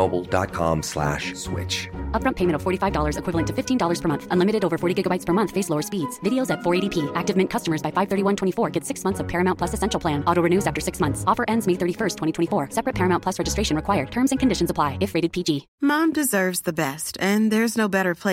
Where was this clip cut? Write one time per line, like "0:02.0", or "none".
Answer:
0:15.7